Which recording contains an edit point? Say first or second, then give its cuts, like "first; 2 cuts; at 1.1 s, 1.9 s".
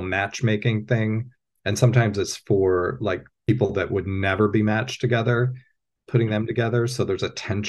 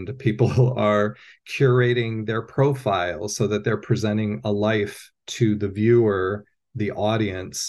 first; 1 cut; at 3.3 s